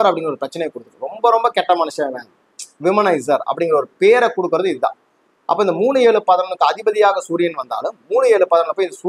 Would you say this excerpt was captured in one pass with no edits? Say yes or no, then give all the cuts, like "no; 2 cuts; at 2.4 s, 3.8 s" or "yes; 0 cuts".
yes; 0 cuts